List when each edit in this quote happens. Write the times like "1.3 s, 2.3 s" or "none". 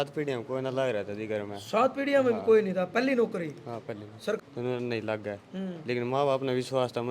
4.4 s